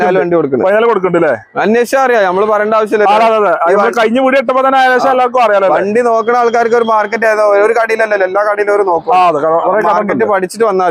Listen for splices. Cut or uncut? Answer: uncut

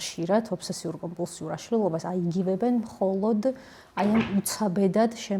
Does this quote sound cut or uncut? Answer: uncut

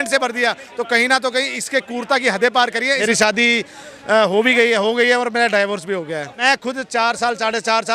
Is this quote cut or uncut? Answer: cut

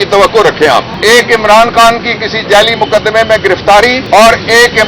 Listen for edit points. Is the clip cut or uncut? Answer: cut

